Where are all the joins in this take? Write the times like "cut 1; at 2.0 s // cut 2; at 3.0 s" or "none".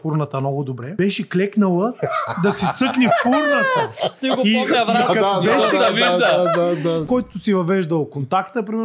cut 1; at 0.9 s // cut 2; at 7.0 s